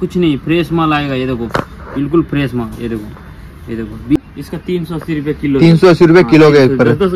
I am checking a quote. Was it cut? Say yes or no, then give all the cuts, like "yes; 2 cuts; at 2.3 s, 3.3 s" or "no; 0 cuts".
yes; 1 cut; at 4.2 s